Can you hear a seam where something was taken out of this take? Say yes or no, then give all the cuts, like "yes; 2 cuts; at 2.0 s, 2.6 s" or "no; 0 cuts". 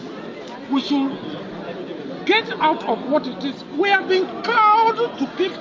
no; 0 cuts